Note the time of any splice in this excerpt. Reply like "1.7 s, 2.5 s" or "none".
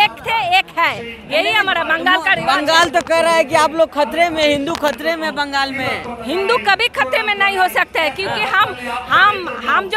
none